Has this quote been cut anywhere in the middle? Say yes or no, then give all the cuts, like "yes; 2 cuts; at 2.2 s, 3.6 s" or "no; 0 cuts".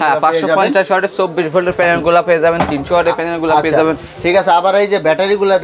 no; 0 cuts